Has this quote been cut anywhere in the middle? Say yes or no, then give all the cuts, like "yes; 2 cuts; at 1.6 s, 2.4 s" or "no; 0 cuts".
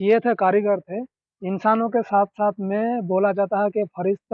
no; 0 cuts